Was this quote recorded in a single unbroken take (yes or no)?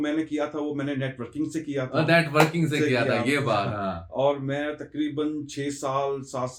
yes